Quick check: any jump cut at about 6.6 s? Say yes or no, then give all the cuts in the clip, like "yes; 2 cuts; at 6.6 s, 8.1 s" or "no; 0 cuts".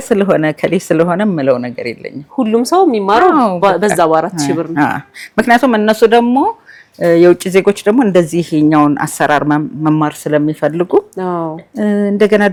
no; 0 cuts